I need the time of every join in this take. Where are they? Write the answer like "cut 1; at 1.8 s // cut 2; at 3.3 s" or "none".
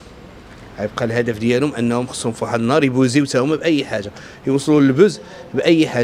none